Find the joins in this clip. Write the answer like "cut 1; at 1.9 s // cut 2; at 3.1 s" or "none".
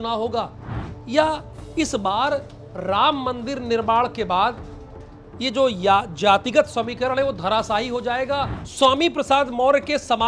cut 1; at 8.6 s